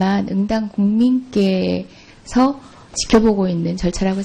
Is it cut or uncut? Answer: uncut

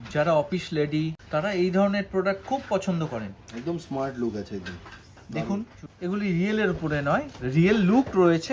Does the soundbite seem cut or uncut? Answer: cut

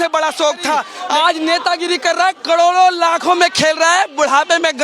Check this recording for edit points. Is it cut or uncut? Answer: cut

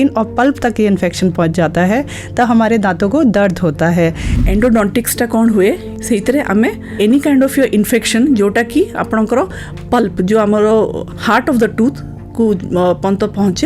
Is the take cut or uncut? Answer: cut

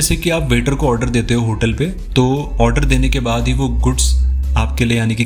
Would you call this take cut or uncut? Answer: uncut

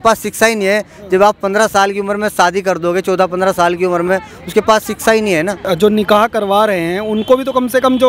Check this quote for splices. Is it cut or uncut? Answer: cut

